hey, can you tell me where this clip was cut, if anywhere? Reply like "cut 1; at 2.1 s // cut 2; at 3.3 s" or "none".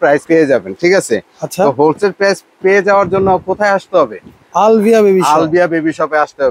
none